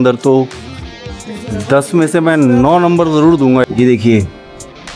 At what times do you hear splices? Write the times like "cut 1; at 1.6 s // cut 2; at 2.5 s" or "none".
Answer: cut 1; at 3.6 s

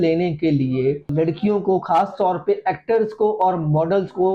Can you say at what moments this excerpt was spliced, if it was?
cut 1; at 1.1 s

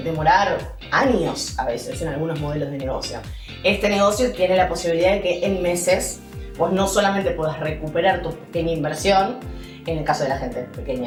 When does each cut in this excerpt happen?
none

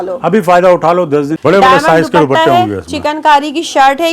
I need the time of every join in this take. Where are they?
cut 1; at 1.3 s

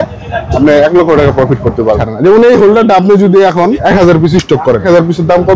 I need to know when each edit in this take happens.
cut 1; at 2.1 s // cut 2; at 3.8 s // cut 3; at 4.8 s

